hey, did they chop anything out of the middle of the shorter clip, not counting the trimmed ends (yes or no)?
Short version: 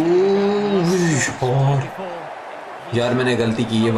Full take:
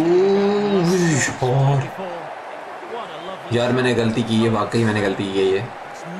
yes